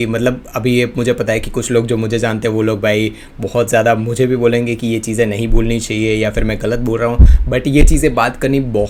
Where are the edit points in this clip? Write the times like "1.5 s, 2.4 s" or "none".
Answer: none